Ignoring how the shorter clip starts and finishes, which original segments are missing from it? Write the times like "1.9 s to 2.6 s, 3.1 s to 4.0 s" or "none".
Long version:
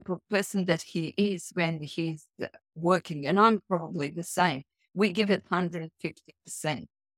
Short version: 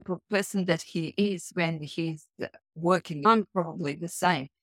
3.2 s to 3.4 s